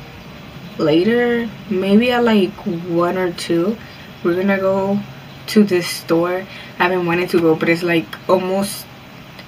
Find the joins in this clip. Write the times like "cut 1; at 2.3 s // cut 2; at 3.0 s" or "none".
none